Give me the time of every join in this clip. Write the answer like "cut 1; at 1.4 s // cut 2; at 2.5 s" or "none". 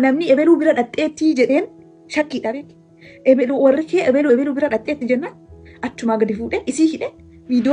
none